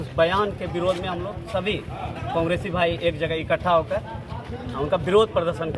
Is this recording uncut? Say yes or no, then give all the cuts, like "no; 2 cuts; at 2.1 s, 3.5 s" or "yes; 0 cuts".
yes; 0 cuts